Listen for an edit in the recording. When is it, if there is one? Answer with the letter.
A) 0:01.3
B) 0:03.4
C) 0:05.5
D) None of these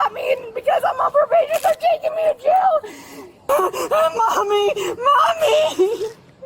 B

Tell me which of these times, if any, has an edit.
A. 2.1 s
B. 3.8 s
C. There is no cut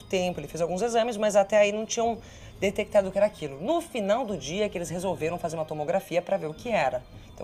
C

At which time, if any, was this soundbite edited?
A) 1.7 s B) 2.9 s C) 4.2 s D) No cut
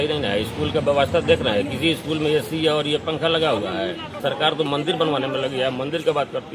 C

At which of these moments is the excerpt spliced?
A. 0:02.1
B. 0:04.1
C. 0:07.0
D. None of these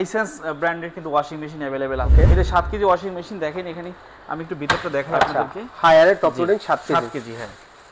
A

